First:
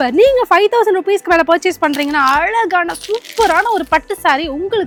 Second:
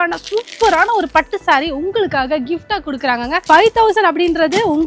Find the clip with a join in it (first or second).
second